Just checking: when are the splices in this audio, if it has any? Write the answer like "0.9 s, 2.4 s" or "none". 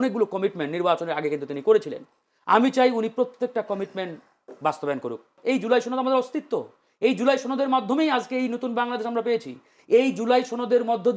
5.3 s